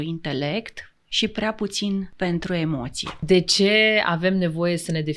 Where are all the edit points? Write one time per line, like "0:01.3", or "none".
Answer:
0:02.1
0:03.2